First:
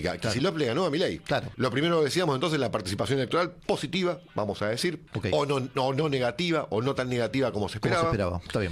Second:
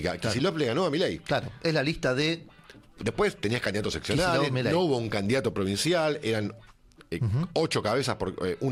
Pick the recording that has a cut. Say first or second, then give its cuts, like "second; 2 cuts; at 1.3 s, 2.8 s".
first; 2 cuts; at 1.5 s, 5.1 s